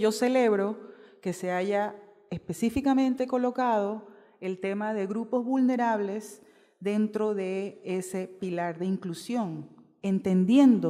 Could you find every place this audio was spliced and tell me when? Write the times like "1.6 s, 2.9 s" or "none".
3.5 s

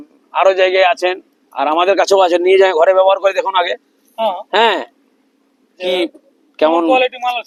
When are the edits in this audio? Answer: none

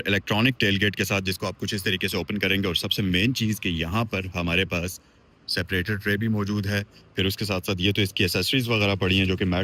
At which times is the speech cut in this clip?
none

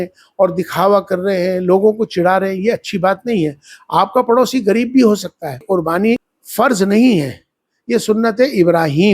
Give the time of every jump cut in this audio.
5.8 s

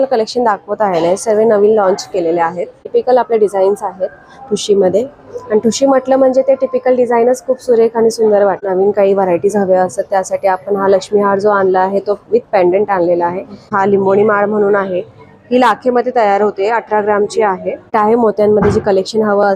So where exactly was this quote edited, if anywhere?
2.9 s, 8.6 s, 13.7 s, 17.9 s

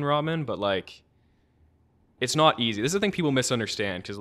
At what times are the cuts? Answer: none

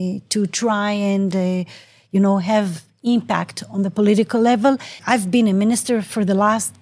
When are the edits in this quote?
5.0 s

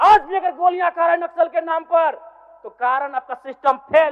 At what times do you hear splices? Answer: none

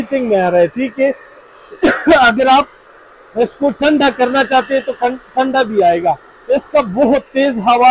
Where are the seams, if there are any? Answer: none

